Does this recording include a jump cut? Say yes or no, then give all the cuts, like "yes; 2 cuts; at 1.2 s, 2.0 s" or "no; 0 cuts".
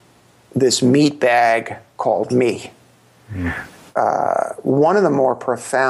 yes; 1 cut; at 3.6 s